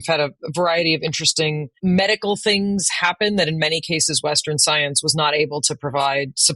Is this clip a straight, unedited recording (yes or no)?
no